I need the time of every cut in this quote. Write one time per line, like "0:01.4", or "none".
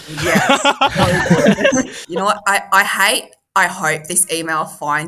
0:02.0